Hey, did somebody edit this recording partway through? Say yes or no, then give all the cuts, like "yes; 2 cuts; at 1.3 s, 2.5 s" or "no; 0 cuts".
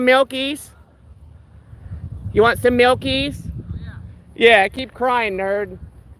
no; 0 cuts